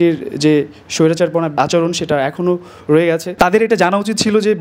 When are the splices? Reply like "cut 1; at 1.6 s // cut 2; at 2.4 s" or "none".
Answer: cut 1; at 1.5 s // cut 2; at 3.3 s